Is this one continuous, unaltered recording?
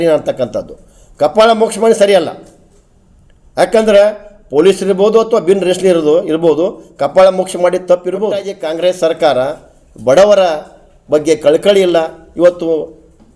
no; 1 cut; at 8.6 s

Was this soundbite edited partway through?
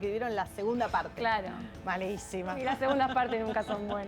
yes; 1 cut; at 2.6 s

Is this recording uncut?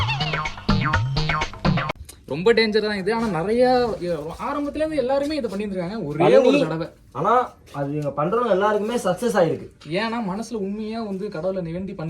no; 1 cut; at 2.0 s

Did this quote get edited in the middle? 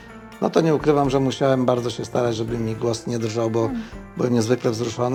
no; 0 cuts

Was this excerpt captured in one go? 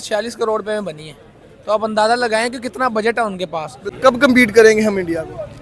no; 1 cut; at 3.8 s

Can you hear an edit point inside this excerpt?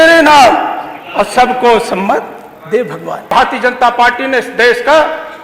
yes; 1 cut; at 3.3 s

